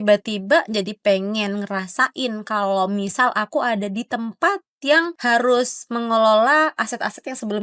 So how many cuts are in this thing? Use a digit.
1